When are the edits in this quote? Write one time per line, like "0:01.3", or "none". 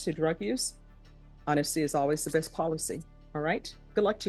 none